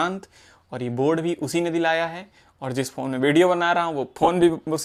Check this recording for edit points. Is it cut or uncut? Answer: uncut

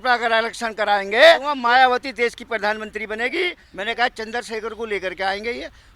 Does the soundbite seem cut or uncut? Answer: cut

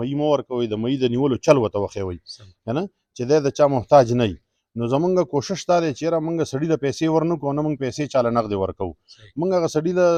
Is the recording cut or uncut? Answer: uncut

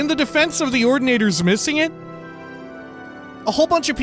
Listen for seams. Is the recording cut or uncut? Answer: uncut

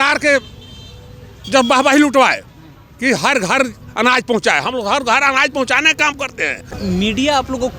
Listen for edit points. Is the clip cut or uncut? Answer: cut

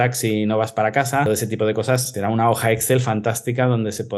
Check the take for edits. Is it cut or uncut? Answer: cut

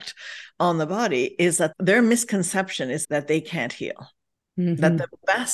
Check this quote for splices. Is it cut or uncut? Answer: cut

